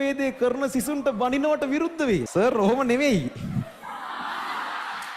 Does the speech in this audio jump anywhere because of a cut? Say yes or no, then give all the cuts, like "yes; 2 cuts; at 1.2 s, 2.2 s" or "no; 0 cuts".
yes; 1 cut; at 2.3 s